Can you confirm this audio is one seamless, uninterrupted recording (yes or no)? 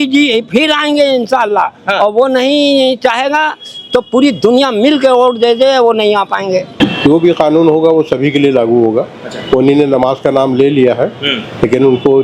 no